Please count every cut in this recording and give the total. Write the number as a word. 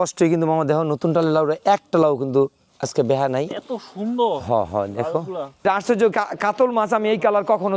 one